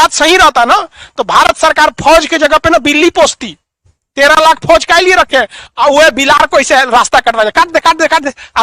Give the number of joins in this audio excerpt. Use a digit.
0